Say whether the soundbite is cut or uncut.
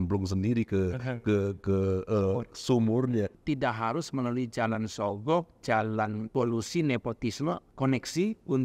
cut